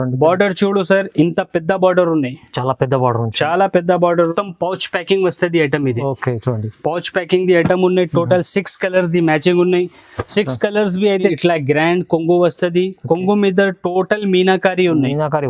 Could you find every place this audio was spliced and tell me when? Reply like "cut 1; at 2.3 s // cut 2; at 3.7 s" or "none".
cut 1; at 4.3 s // cut 2; at 11.4 s